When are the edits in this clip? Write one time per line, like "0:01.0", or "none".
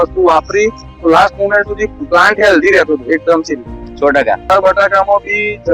0:04.5